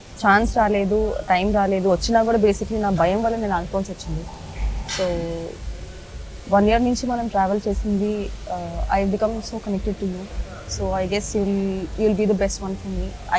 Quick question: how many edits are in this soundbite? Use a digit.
0